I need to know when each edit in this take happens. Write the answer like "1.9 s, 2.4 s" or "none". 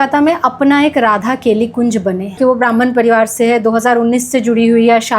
2.4 s

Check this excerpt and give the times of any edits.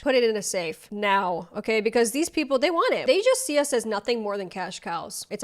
3.0 s

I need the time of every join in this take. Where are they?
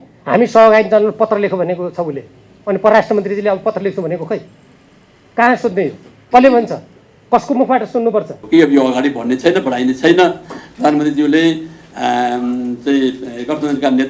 8.4 s

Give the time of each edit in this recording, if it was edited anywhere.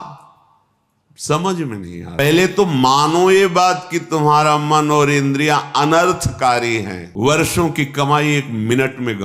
2.1 s, 7.0 s

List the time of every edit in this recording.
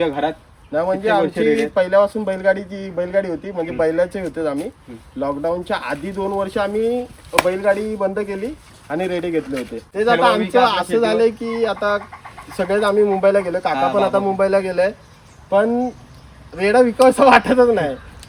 9.9 s

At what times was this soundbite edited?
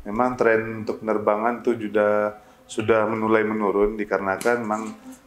none

